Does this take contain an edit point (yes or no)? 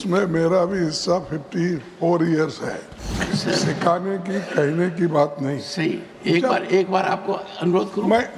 yes